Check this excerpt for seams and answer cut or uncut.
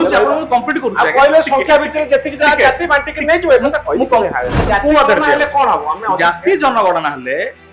cut